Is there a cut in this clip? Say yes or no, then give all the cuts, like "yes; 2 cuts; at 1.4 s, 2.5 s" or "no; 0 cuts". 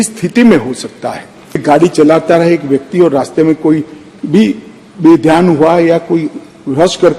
yes; 1 cut; at 1.6 s